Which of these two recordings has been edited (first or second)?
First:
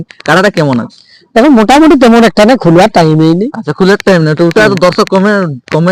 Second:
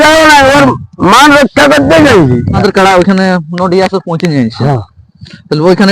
second